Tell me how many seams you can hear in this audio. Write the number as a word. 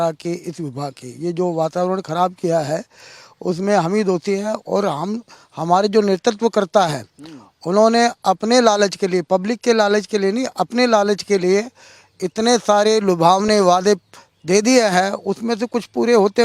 zero